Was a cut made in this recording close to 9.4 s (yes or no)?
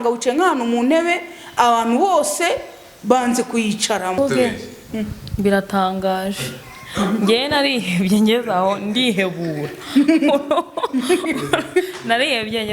no